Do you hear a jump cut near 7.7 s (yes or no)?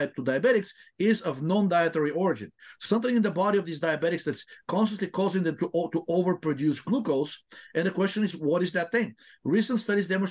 no